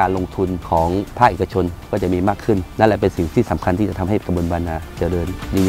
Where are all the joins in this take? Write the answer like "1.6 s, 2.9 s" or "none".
none